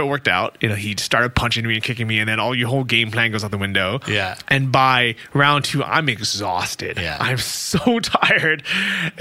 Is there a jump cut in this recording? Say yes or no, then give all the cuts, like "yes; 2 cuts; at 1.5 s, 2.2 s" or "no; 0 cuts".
no; 0 cuts